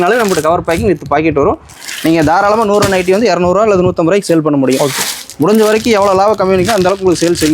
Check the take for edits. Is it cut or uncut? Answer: uncut